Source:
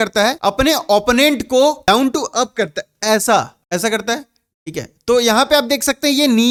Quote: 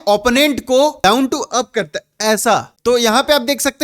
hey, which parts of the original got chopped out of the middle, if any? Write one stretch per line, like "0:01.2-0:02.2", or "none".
0:03.5-0:04.9